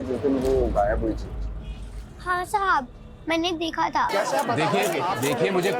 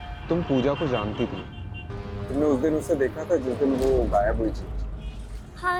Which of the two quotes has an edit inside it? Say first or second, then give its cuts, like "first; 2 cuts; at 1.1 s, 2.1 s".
first; 1 cut; at 4.1 s